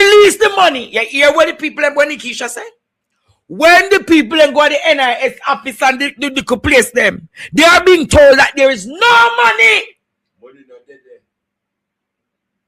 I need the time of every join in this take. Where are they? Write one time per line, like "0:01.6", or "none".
none